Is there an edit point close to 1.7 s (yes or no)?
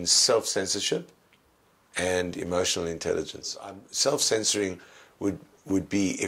no